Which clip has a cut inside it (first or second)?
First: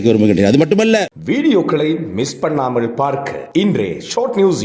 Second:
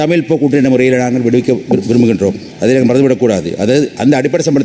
first